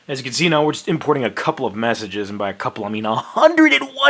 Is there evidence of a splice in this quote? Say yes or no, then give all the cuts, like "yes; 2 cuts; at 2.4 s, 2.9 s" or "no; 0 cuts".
no; 0 cuts